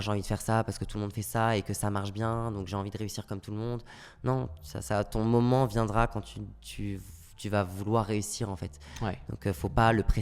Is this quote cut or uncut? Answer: uncut